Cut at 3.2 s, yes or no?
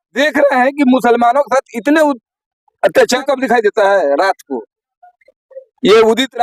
yes